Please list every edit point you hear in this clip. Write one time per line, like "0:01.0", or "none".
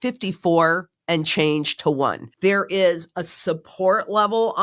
0:00.9
0:02.3